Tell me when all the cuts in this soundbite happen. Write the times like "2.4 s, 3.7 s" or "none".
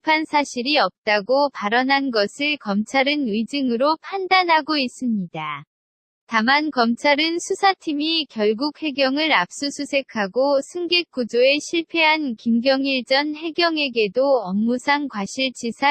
2.4 s